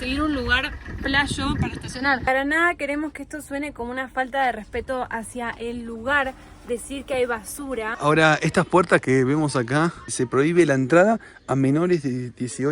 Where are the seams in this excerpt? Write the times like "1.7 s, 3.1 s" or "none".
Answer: 2.2 s, 7.9 s, 10.1 s